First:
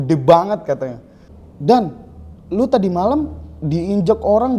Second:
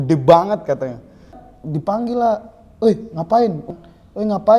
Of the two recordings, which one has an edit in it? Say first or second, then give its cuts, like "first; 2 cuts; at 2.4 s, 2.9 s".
second; 2 cuts; at 1.5 s, 3.6 s